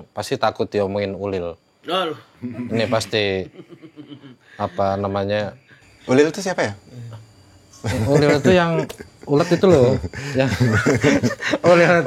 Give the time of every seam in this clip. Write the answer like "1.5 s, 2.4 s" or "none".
none